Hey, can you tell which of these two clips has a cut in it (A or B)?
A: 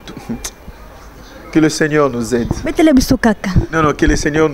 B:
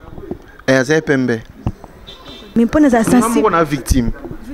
B